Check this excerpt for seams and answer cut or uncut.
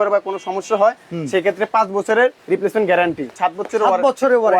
cut